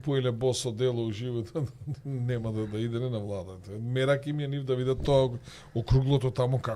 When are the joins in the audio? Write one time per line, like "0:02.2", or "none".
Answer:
none